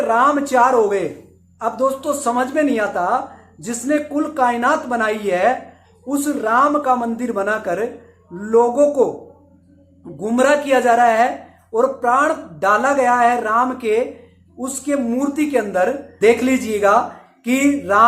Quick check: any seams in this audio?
yes; 1 cut; at 16.1 s

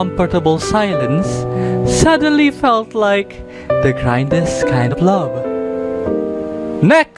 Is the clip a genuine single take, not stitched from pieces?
no; 1 cut; at 4.9 s

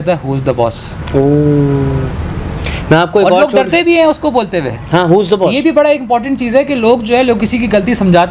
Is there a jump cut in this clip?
no; 0 cuts

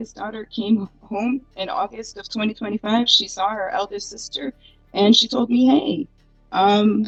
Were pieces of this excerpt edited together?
no; 0 cuts

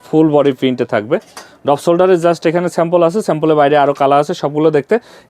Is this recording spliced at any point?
no; 0 cuts

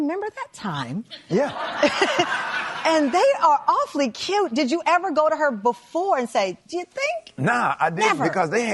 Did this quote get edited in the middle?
no; 0 cuts

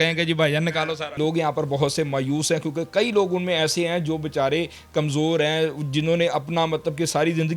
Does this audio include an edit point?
yes; 1 cut; at 1.2 s

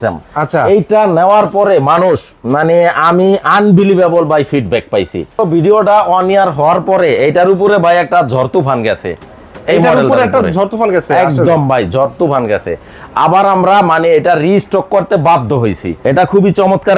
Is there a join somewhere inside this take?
yes; 2 cuts; at 5.3 s, 15.9 s

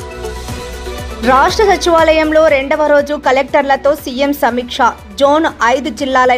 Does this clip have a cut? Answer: yes; 1 cut; at 1.2 s

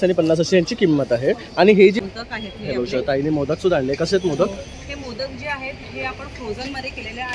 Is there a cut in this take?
yes; 1 cut; at 2.0 s

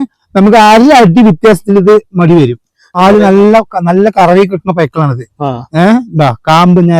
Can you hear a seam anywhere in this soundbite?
yes; 1 cut; at 2.9 s

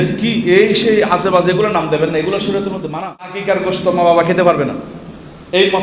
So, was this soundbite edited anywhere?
yes; 1 cut; at 3.4 s

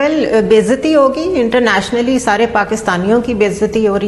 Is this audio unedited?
yes; 0 cuts

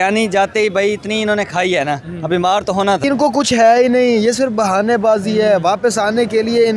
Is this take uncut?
no; 1 cut; at 3.0 s

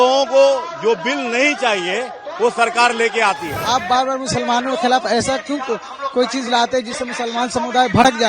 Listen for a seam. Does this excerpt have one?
yes; 1 cut; at 3.5 s

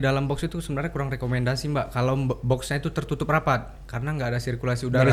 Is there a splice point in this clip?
no; 0 cuts

